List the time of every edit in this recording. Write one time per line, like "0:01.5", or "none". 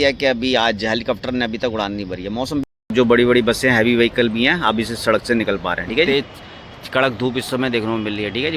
0:02.9
0:06.1